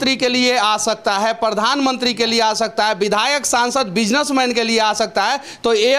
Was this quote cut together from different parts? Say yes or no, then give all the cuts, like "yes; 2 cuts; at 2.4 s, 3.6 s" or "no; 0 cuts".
no; 0 cuts